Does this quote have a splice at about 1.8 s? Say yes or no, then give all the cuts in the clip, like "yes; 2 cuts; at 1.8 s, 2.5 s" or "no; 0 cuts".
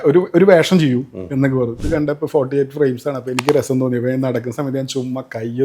yes; 1 cut; at 1.8 s